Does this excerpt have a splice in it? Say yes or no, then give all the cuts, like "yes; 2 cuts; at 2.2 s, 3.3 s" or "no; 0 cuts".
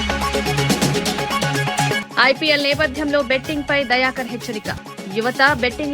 yes; 1 cut; at 2.0 s